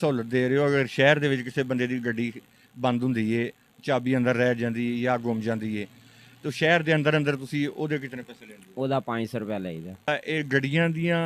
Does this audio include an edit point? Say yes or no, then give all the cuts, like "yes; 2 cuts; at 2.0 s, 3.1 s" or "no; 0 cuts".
no; 0 cuts